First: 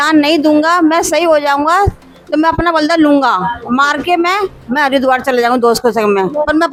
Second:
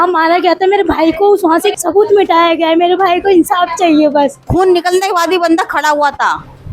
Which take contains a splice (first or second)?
second